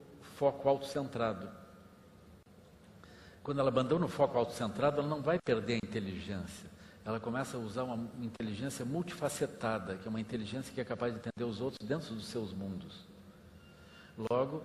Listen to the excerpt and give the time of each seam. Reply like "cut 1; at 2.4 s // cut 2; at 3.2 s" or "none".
none